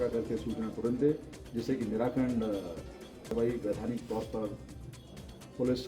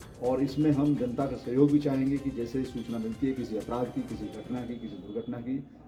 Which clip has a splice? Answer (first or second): first